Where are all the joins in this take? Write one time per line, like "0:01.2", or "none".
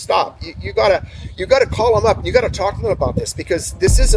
none